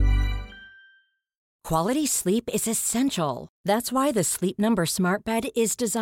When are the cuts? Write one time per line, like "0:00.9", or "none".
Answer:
0:01.5